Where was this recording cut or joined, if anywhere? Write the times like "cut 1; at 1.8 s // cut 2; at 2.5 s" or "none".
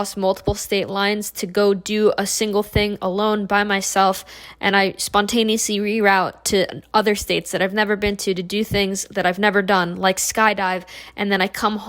none